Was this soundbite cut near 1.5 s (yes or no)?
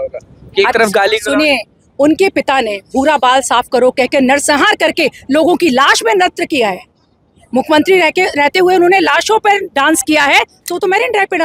no